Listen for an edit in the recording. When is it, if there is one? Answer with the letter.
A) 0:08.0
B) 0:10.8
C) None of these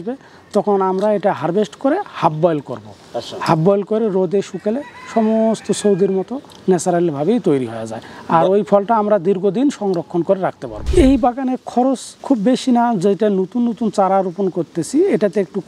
B